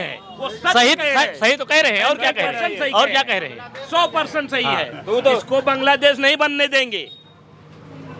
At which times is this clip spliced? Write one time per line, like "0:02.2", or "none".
none